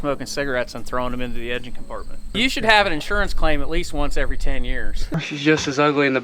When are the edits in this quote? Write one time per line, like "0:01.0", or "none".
0:02.2
0:05.0